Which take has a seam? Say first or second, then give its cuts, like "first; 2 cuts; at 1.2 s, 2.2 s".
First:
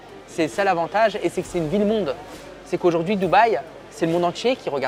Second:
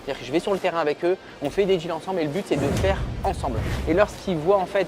second; 1 cut; at 3.7 s